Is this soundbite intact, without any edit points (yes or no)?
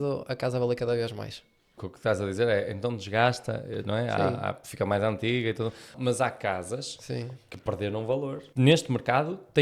no